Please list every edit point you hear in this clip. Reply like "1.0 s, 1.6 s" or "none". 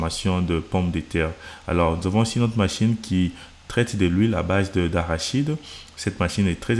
none